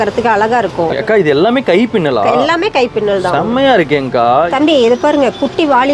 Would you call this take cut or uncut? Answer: cut